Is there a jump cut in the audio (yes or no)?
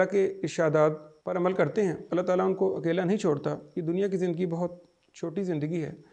yes